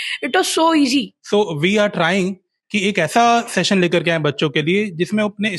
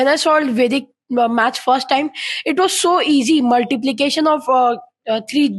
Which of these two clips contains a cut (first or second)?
first